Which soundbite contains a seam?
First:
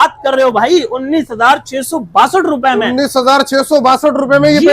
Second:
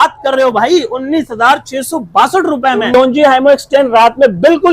second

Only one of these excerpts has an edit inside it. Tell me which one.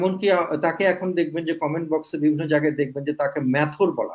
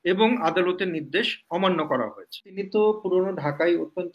second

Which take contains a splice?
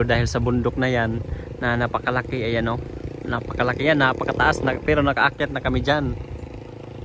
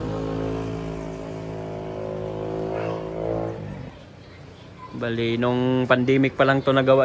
second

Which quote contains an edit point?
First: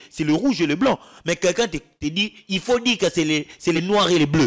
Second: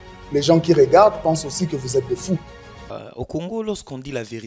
second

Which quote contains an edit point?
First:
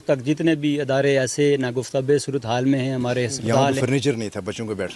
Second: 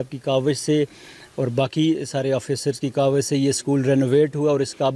first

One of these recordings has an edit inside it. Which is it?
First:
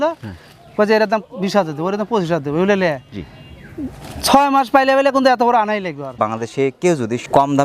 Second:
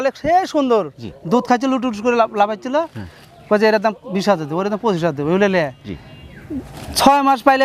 first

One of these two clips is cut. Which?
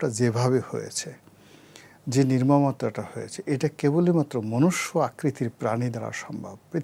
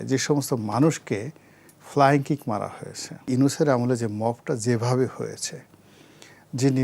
second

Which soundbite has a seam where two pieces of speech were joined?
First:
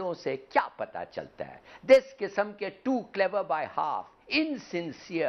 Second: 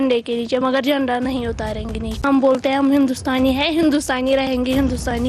second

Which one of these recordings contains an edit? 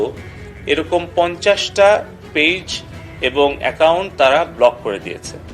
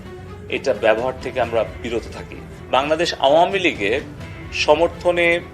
second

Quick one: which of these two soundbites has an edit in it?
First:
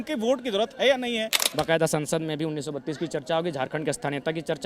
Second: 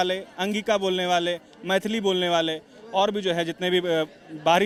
first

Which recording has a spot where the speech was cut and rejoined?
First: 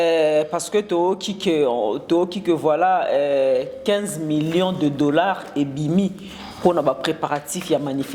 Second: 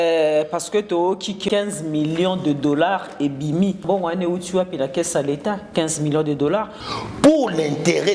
second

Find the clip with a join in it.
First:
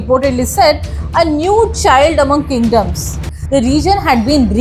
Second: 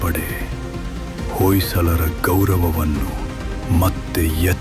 first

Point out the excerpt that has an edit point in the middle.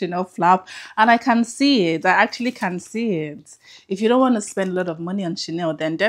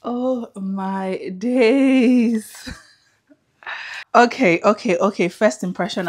second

